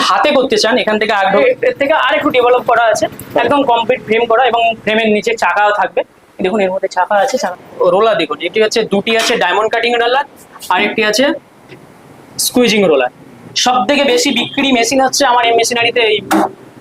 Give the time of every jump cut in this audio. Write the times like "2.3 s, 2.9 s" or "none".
1.3 s, 7.4 s, 13.4 s